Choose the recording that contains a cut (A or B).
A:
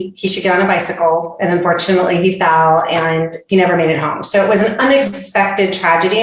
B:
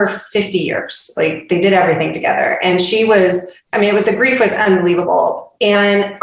B